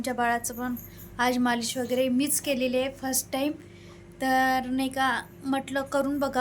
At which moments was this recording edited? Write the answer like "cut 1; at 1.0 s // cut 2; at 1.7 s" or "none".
none